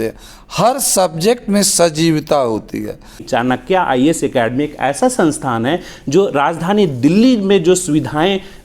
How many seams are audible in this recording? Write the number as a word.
one